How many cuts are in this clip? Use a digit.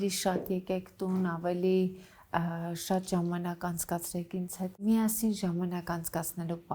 1